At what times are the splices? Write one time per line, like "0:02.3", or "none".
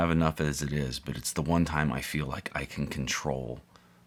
none